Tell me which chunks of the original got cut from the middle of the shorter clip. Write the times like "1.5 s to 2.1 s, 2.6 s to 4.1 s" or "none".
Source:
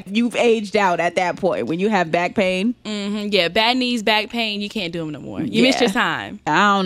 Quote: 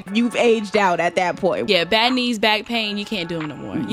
1.6 s to 3.3 s